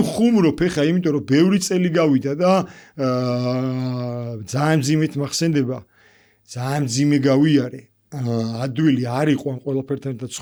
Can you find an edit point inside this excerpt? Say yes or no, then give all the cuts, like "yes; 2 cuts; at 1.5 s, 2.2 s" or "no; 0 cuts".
no; 0 cuts